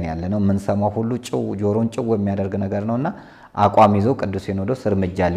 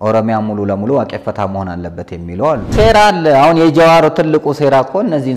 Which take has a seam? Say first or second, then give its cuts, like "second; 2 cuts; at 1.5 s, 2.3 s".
second; 1 cut; at 2.8 s